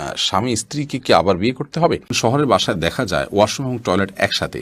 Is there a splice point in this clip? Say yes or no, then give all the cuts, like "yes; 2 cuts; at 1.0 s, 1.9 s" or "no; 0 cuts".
yes; 1 cut; at 2.1 s